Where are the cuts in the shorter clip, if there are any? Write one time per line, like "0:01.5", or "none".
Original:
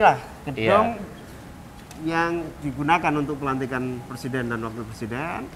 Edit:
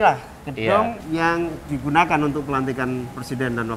0:01.0